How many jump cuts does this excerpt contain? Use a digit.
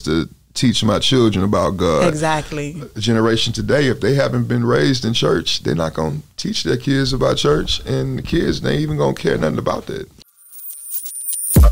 1